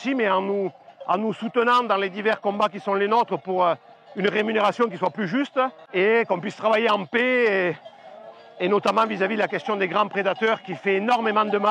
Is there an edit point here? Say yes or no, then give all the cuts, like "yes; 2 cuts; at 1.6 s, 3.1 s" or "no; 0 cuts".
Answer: yes; 1 cut; at 5.8 s